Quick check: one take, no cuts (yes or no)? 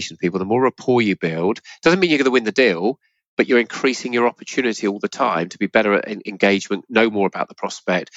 yes